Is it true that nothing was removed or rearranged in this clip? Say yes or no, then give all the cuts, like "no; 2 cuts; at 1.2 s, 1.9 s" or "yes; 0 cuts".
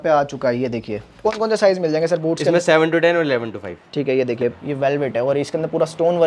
no; 2 cuts; at 1.2 s, 4.6 s